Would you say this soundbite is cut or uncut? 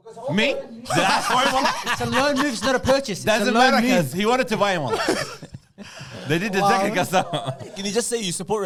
uncut